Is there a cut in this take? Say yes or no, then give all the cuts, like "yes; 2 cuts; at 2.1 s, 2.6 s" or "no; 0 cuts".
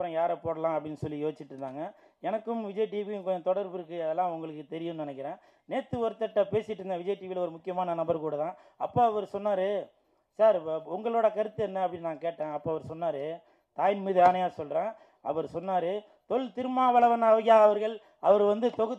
no; 0 cuts